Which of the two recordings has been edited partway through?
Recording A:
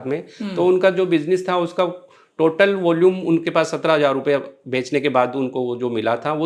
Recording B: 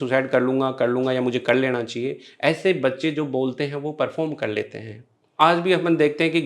B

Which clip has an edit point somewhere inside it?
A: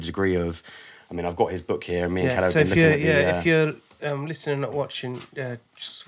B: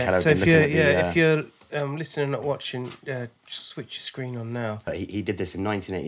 B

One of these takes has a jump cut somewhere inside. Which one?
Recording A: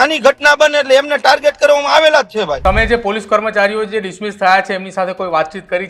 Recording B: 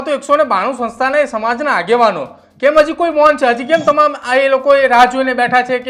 A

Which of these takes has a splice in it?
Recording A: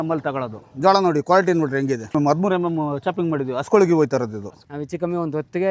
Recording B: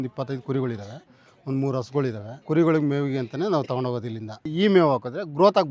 A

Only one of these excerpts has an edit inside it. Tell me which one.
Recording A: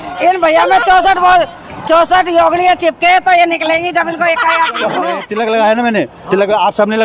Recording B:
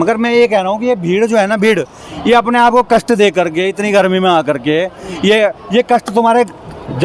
A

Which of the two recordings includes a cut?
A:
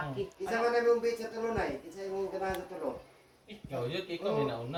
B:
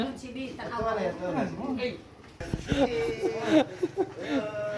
B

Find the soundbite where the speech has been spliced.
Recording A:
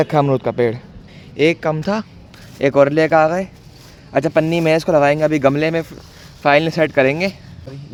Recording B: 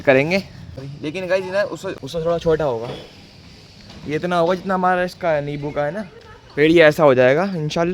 B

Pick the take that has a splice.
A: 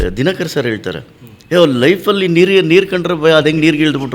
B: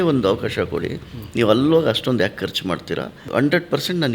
B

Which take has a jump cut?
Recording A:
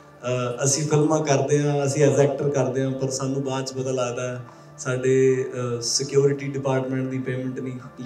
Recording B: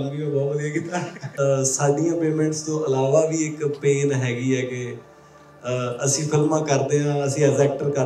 B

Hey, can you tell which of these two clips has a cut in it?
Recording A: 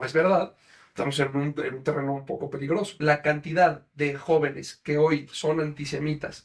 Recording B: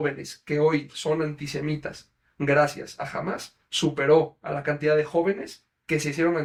A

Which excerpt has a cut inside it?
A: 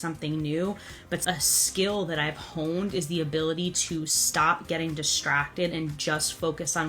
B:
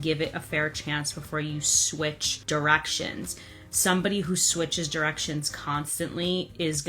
B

